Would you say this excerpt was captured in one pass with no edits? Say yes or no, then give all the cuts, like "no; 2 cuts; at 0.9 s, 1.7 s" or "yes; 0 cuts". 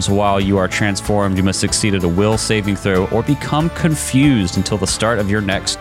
yes; 0 cuts